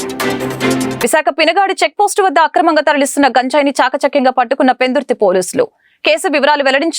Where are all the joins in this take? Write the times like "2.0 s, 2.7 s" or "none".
1.0 s